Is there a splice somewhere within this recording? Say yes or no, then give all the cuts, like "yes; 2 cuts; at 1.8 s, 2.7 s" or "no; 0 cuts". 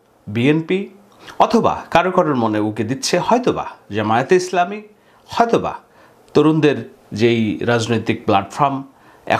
no; 0 cuts